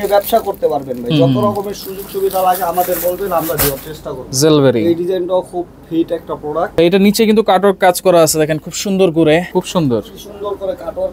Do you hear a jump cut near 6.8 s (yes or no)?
yes